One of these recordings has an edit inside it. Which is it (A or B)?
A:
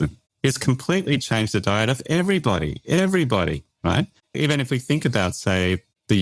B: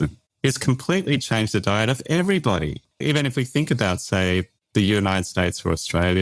B